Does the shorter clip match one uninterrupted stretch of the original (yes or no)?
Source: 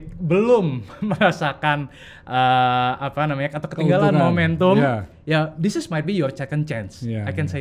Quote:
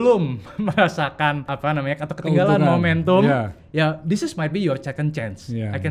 no